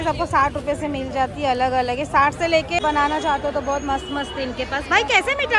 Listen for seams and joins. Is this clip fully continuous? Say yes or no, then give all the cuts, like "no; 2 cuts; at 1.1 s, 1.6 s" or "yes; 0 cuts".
no; 1 cut; at 2.8 s